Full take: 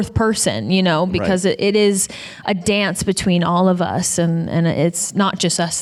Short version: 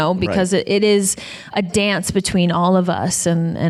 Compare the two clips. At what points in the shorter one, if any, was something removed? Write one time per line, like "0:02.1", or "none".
none